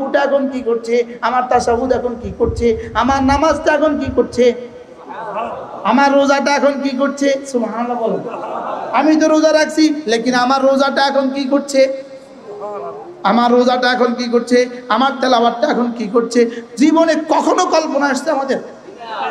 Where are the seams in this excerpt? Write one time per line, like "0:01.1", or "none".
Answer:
none